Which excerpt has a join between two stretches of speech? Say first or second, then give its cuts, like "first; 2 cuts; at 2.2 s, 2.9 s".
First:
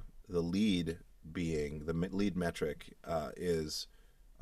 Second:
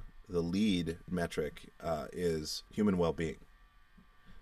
second; 2 cuts; at 1.1 s, 2.6 s